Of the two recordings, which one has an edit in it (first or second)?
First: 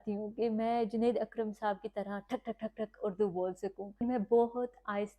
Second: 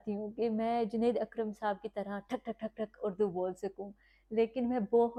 first